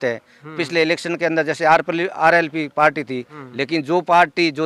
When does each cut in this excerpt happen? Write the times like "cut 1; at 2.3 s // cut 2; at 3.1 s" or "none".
cut 1; at 3.3 s